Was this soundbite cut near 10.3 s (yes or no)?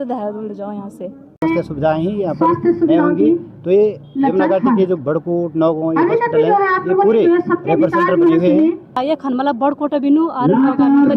no